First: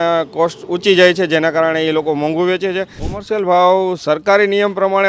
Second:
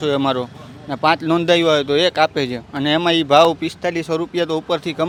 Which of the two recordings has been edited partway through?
first; 1 cut; at 3.0 s

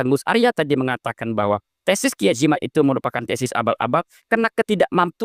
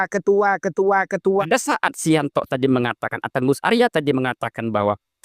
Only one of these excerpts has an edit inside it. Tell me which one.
second; 1 cut; at 1.4 s

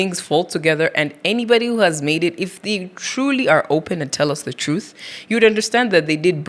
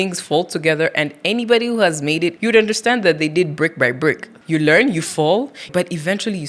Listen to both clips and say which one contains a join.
second; 3 cuts; at 2.3 s, 4.3 s, 5.7 s

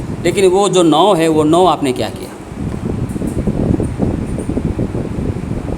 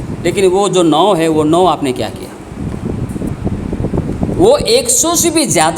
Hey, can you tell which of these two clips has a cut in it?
second; 1 cut; at 3.3 s

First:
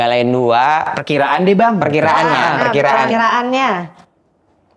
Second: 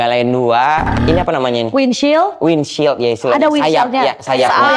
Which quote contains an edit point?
second; 1 cut; at 0.9 s

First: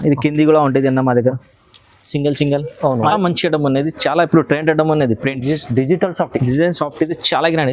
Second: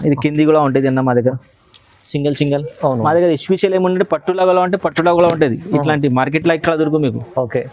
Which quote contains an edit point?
first; 1 cut; at 3.1 s

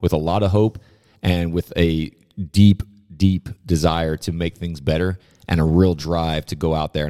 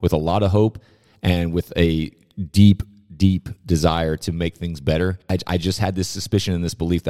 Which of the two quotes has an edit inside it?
second; 1 cut; at 5.3 s

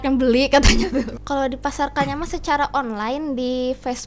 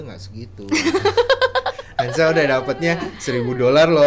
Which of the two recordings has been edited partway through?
first; 1 cut; at 1.2 s

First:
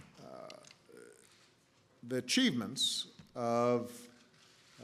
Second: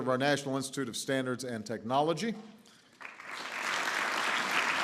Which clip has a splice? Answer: second; 1 cut; at 2.0 s

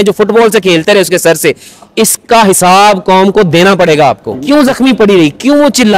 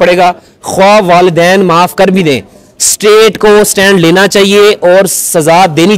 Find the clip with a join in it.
first; 1 cut; at 4.3 s

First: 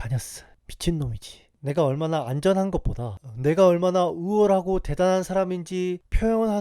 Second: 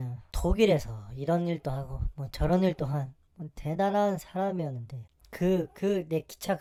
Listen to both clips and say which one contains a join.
first; 1 cut; at 1.5 s

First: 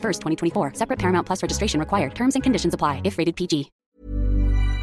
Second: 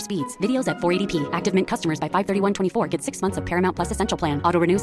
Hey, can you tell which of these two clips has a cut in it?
first; 1 cut; at 3.8 s

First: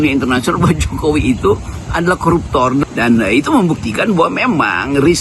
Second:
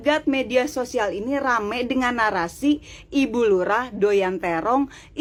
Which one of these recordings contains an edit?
first; 1 cut; at 2.9 s

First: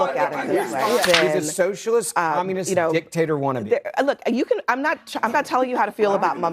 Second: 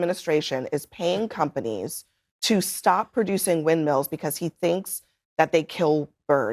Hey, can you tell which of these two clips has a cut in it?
first; 1 cut; at 1.0 s

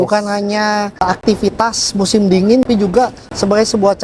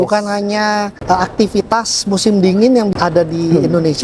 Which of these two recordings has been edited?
first; 2 cuts; at 1.0 s, 2.6 s

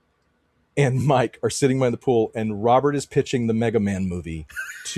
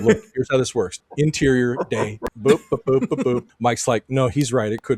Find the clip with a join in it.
second; 3 cuts; at 0.9 s, 2.2 s, 3.5 s

